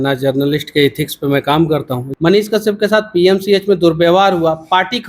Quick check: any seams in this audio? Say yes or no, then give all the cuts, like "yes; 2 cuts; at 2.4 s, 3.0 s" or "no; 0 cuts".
yes; 1 cut; at 2.0 s